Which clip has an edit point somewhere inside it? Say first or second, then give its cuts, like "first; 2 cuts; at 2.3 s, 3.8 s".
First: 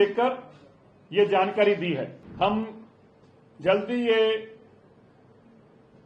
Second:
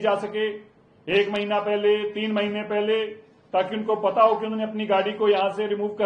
first; 1 cut; at 2.2 s